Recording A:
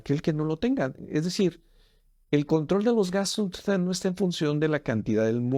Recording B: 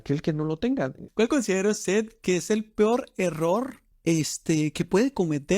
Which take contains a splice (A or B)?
B